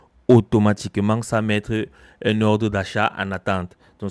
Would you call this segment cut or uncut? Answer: uncut